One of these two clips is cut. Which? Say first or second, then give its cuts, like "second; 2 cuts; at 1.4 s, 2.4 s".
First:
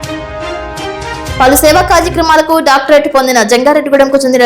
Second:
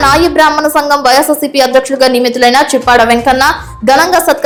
first; 1 cut; at 1.3 s